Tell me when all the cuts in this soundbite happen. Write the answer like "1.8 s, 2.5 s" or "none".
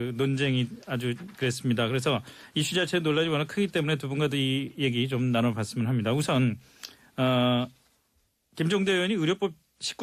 6.2 s